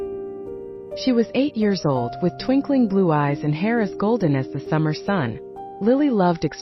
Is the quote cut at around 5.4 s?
no; 1 cut; at 1.0 s

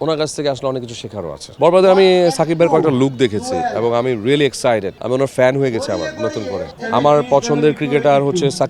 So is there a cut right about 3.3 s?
no; 3 cuts; at 1.5 s, 5.0 s, 6.7 s

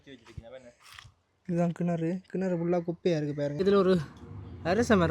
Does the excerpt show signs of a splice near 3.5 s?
yes; 1 cut; at 3.5 s

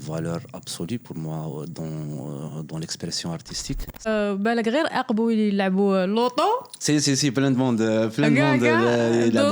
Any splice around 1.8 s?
no; 1 cut; at 4.1 s

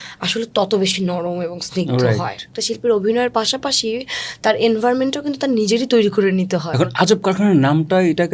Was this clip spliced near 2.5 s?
yes; 2 cuts; at 2.5 s, 6.7 s

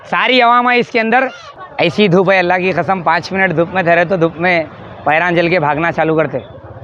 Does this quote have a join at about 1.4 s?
yes; 1 cut; at 1.4 s

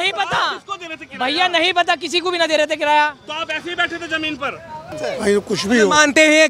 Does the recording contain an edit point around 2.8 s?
no; 1 cut; at 5.0 s

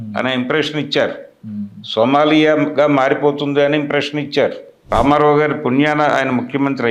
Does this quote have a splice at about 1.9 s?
no; 1 cut; at 4.7 s

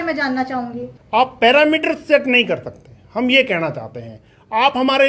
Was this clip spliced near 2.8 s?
no; 1 cut; at 0.9 s

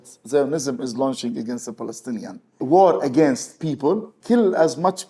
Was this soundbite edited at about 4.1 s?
yes; 2 cuts; at 2.6 s, 4.1 s

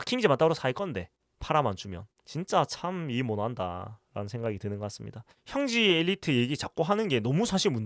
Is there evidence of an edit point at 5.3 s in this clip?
yes; 1 cut; at 5.3 s

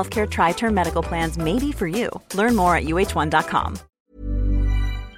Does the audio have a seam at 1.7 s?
no; 1 cut; at 4.0 s

